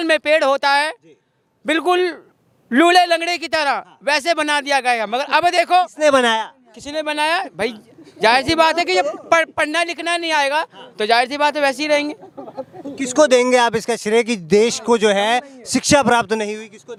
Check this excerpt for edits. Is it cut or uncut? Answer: uncut